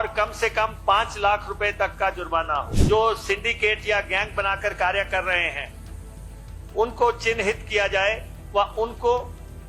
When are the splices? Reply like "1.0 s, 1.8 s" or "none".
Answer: 2.7 s

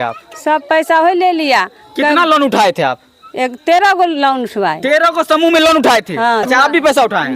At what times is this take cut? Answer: 6.4 s

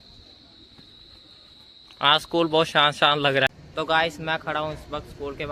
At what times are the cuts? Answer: 3.5 s

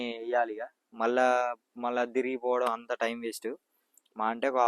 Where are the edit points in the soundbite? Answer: none

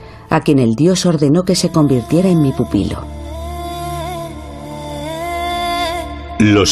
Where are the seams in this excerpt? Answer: none

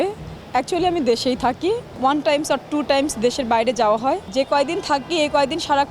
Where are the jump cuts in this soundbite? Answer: 1.9 s, 4.3 s

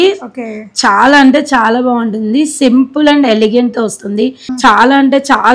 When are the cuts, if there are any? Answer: 4.5 s

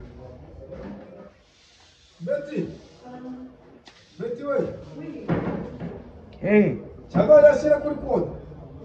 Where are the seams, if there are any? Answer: none

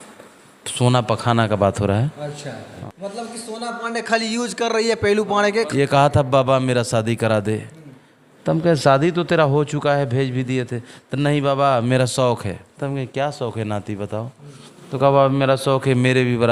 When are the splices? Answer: 2.8 s, 5.7 s

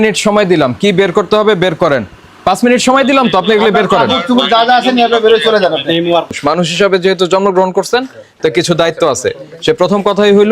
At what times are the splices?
2.4 s, 6.4 s

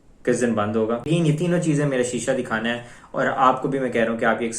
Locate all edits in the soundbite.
1.1 s

